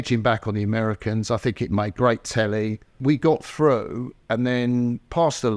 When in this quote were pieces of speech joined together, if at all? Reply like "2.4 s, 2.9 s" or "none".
3.0 s